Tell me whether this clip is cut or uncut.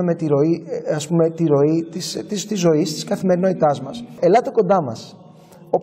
cut